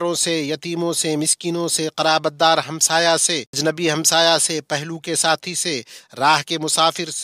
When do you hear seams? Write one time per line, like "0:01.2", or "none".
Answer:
0:03.5

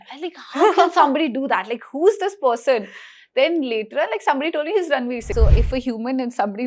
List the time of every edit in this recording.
0:05.3

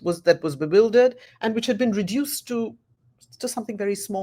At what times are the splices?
none

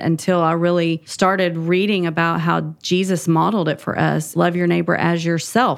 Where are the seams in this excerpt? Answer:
0:01.1
0:04.3

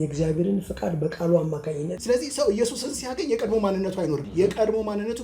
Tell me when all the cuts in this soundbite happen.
0:02.0
0:04.2

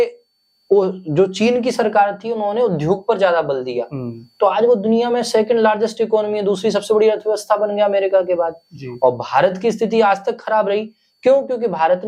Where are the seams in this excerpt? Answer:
none

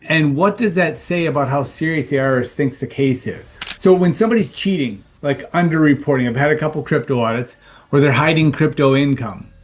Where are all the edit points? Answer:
0:03.7

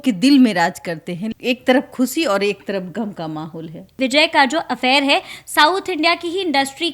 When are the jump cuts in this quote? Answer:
0:01.3
0:04.0

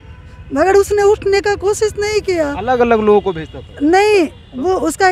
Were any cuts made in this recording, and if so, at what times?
none

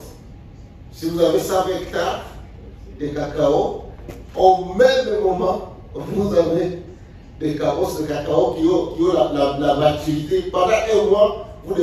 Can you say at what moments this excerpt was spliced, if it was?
none

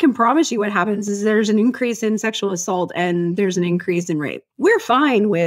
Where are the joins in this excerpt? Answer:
0:04.4

